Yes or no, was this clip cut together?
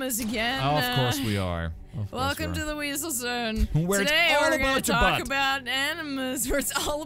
no